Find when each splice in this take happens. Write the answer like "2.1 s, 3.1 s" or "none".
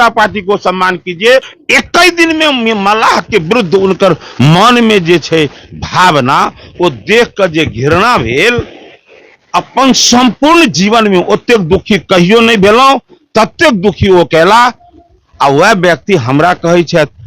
1.5 s